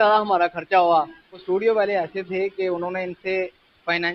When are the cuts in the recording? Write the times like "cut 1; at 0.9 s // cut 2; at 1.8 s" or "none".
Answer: cut 1; at 1.4 s